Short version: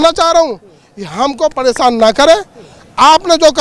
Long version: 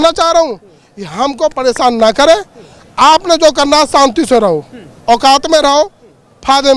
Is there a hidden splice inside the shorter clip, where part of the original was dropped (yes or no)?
no